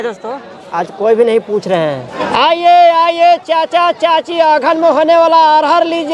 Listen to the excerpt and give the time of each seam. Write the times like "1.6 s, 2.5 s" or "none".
2.1 s